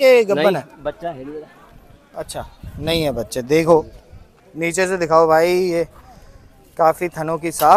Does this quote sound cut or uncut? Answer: uncut